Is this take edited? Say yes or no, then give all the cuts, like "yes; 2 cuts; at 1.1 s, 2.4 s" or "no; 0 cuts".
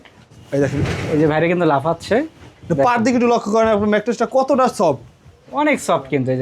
no; 0 cuts